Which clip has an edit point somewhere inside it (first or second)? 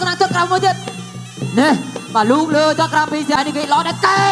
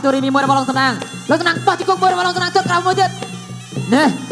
first